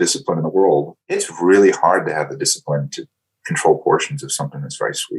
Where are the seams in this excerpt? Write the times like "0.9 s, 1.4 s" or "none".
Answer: 1.2 s